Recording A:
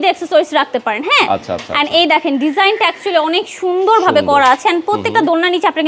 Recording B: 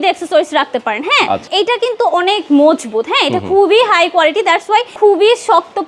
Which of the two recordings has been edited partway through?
B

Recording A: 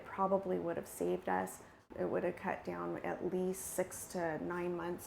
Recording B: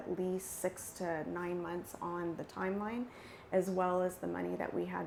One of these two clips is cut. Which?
A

